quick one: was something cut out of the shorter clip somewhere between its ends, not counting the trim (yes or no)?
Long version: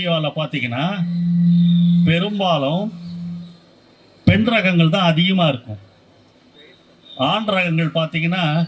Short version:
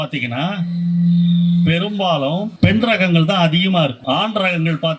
yes